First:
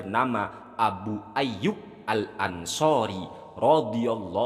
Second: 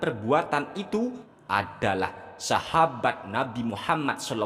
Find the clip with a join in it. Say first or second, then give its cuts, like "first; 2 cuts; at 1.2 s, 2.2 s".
second; 1 cut; at 1.3 s